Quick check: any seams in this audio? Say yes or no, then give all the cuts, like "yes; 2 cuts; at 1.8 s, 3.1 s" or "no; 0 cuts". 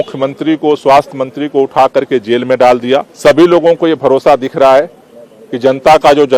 yes; 1 cut; at 3.1 s